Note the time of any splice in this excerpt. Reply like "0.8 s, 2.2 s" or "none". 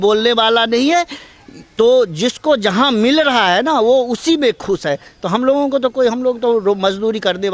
none